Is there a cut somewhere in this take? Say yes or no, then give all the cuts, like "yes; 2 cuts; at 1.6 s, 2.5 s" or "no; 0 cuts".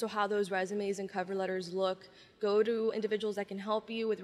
yes; 1 cut; at 2.9 s